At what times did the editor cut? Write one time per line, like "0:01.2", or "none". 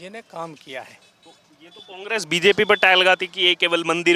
none